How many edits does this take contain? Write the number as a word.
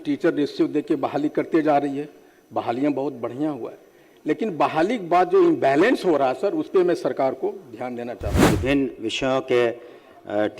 one